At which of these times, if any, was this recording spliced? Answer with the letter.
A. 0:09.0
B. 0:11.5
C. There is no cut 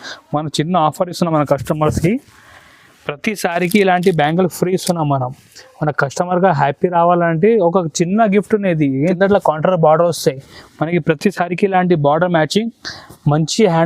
A